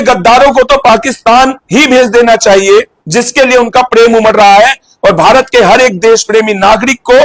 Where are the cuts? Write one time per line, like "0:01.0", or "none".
0:01.6
0:03.0